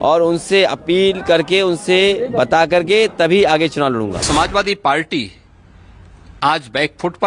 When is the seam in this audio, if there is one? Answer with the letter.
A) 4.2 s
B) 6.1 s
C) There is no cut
A